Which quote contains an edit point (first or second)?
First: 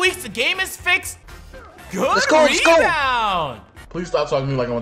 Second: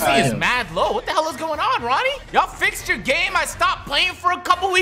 first